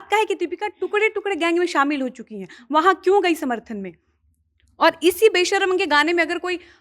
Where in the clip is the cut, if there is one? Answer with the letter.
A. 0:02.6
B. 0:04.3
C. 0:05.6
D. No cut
D